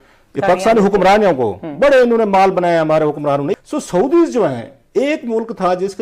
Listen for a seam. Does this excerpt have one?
yes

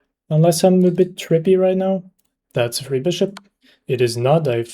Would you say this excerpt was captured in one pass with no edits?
no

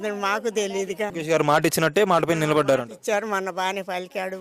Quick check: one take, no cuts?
no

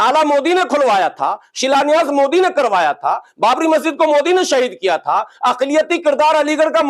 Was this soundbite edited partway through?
no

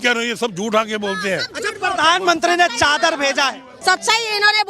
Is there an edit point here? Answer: yes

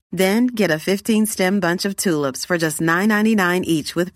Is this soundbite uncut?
yes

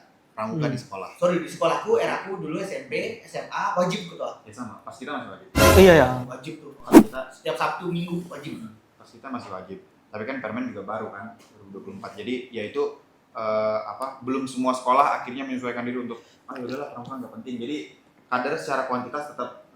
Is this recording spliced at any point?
no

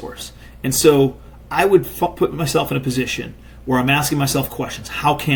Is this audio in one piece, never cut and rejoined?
yes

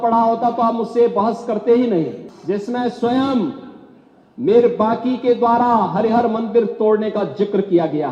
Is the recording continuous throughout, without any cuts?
no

